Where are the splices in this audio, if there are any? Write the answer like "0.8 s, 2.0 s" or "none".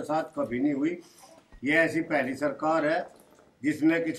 none